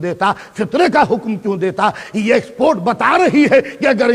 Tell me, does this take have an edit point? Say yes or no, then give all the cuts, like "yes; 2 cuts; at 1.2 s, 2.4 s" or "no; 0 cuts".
no; 0 cuts